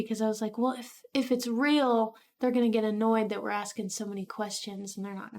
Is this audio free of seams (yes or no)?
yes